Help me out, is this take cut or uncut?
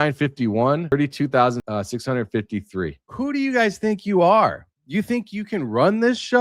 cut